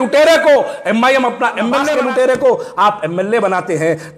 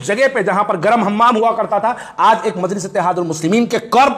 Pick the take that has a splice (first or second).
first